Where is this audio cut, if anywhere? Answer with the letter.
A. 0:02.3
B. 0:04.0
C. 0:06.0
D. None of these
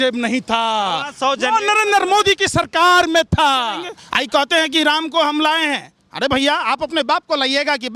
B